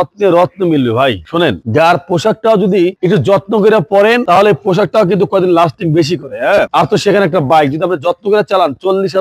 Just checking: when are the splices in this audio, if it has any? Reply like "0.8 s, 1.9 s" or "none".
none